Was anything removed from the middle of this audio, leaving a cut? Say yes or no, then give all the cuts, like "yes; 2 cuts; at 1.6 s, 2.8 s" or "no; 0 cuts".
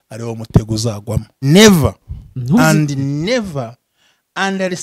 yes; 1 cut; at 1.4 s